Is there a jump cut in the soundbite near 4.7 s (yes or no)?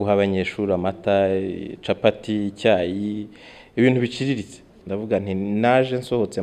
yes